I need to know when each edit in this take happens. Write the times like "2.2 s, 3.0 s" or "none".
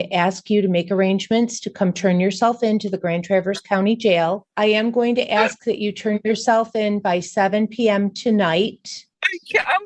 4.5 s